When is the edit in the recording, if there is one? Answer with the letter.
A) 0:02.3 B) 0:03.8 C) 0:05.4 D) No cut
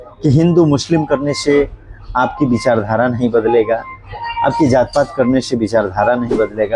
D